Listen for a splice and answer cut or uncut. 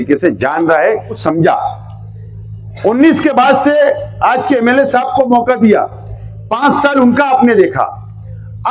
cut